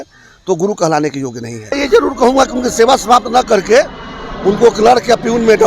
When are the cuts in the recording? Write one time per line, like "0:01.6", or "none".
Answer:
0:01.8